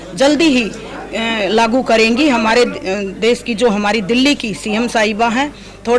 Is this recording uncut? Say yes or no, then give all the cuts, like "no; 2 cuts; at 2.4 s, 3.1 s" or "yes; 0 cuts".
yes; 0 cuts